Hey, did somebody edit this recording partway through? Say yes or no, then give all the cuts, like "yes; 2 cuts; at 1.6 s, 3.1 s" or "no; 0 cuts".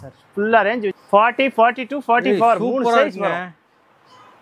yes; 1 cut; at 0.9 s